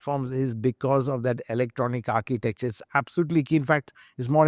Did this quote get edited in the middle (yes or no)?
no